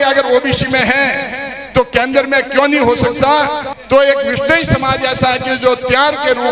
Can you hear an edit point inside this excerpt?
yes; 1 cut; at 3.7 s

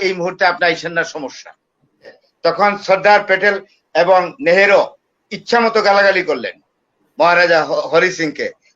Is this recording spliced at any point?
yes; 1 cut; at 2.2 s

